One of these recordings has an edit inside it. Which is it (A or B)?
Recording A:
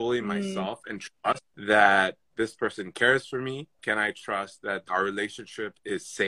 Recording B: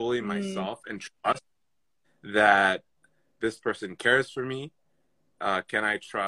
A